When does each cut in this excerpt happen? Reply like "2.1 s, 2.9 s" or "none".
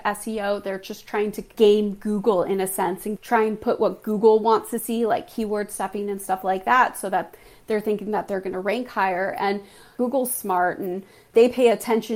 1.5 s, 3.1 s, 9.9 s